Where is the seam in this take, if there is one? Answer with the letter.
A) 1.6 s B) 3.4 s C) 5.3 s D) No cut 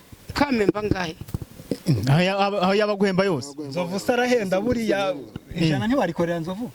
D